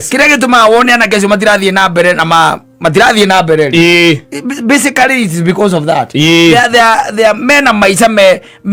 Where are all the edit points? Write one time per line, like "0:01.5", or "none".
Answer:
none